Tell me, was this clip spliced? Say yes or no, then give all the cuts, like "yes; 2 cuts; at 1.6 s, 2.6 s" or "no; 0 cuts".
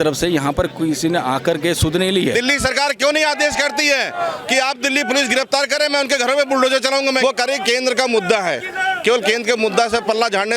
yes; 2 cuts; at 2.3 s, 7.2 s